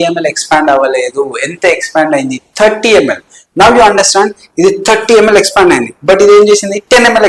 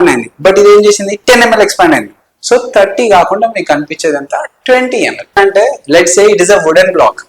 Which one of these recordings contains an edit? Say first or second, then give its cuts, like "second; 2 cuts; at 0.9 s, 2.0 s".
second; 1 cut; at 5.4 s